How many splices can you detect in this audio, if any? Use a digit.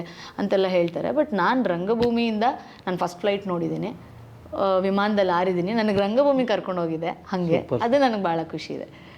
0